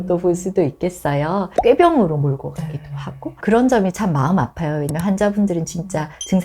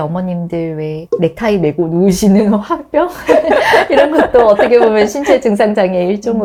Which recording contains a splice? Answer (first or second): first